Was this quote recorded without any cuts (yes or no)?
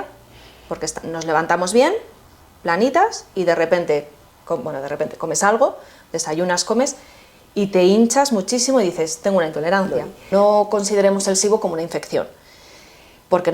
no